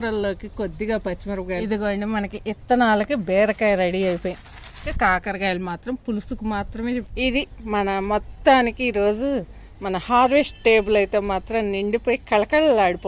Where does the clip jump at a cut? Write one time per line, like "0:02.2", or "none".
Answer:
0:01.6
0:04.9
0:07.1

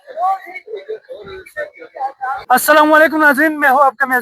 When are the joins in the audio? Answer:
0:02.4

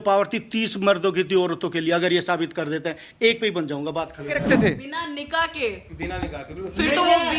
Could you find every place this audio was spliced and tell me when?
0:04.4

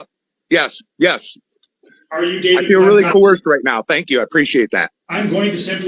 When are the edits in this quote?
0:04.9

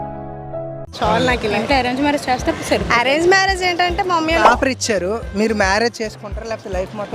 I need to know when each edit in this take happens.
0:04.4

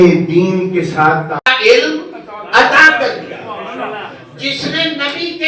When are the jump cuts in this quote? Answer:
0:01.5

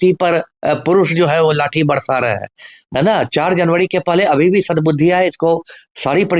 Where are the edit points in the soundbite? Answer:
0:02.7

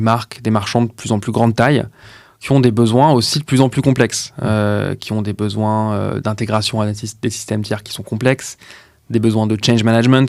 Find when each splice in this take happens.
none

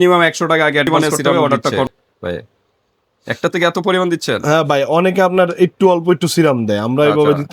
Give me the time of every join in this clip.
0:01.9

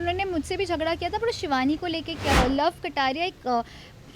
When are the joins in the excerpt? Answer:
0:02.4

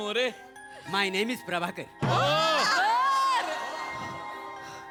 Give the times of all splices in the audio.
none

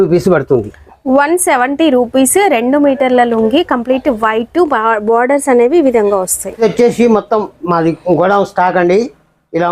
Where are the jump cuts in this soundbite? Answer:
0:06.6

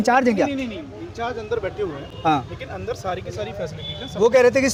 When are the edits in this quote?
none

